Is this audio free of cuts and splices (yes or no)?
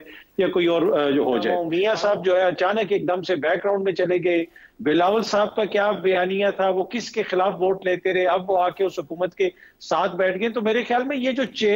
no